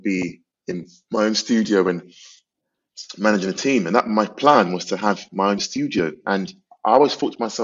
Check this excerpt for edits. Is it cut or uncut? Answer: cut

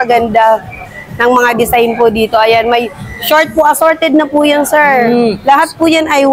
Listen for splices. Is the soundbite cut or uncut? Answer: uncut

